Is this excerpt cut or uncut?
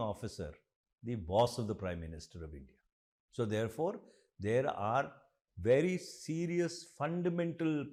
uncut